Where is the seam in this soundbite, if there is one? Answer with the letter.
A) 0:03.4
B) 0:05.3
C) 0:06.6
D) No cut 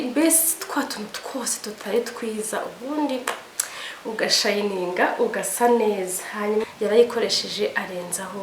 C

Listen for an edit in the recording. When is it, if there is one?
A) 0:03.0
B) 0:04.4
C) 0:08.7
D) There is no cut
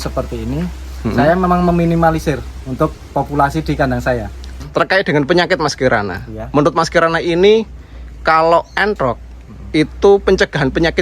B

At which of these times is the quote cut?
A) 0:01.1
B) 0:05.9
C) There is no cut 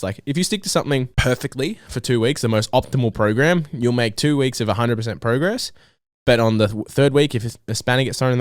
A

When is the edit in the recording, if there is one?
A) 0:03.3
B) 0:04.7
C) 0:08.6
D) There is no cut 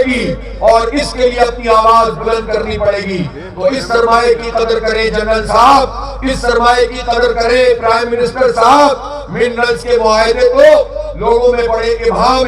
D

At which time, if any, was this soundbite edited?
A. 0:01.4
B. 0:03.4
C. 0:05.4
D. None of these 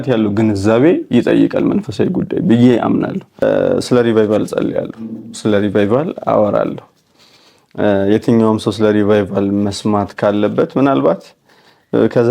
B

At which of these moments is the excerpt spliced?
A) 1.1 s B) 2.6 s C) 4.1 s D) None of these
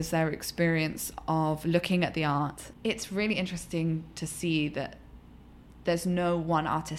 B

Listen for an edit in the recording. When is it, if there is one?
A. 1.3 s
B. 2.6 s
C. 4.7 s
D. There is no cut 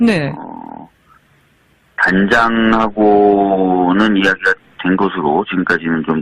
B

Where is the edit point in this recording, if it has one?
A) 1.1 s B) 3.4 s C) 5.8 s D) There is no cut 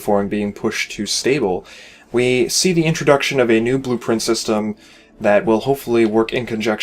C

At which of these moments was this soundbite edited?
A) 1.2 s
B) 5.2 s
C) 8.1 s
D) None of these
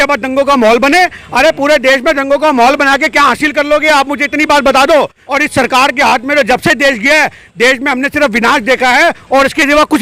B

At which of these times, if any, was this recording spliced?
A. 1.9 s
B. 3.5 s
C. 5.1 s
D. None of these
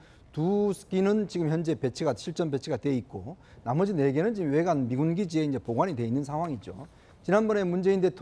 A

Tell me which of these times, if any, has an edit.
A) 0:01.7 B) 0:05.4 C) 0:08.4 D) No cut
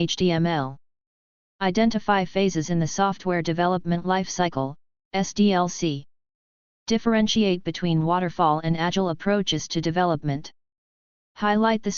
D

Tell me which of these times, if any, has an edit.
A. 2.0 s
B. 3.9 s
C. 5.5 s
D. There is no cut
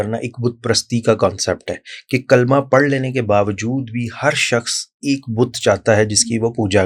D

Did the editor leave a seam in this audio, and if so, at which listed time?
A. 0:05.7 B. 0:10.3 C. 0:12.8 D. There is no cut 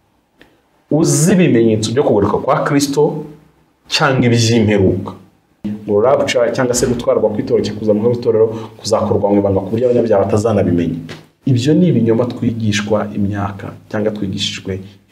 A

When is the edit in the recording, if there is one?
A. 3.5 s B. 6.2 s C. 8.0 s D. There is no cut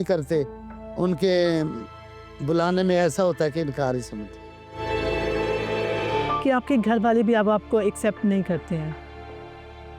B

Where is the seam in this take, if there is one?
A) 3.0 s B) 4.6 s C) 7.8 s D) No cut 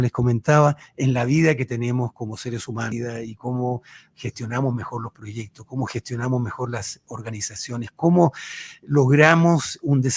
A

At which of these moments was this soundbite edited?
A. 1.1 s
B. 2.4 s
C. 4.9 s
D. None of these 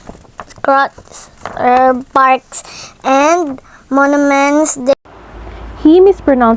D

